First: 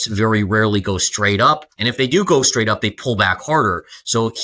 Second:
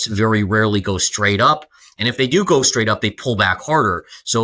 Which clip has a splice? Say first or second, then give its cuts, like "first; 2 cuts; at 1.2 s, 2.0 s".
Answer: first; 1 cut; at 1.7 s